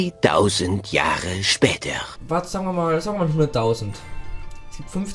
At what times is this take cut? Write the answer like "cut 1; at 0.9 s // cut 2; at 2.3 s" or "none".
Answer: cut 1; at 2.1 s